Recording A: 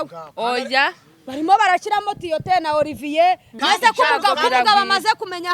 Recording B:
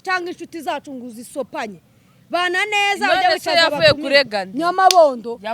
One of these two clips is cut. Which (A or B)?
A